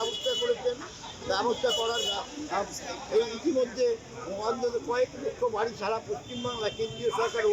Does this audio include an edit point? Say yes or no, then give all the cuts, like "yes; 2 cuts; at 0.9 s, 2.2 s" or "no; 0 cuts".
no; 0 cuts